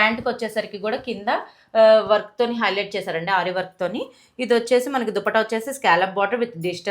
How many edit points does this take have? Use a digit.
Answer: 0